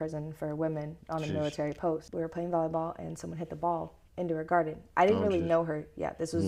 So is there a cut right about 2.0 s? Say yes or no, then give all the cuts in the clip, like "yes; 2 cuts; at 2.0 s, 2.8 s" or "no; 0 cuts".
yes; 1 cut; at 2.0 s